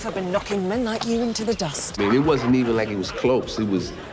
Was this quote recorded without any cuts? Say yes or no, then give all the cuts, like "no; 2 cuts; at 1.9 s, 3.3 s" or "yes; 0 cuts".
no; 1 cut; at 1.8 s